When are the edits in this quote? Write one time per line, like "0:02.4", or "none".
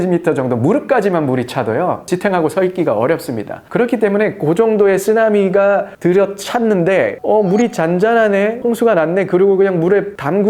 none